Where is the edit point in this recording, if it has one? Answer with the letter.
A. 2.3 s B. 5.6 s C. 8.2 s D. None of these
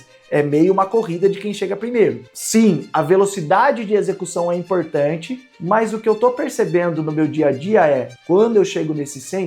A